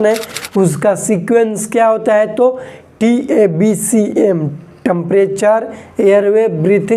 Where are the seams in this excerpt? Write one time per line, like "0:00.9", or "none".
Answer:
none